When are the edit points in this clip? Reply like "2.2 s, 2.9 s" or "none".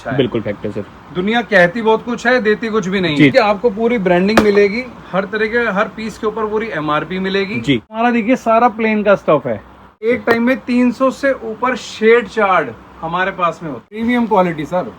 3.3 s, 8.0 s, 10.1 s, 14.0 s